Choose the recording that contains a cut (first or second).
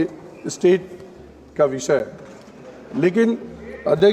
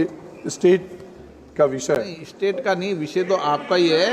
second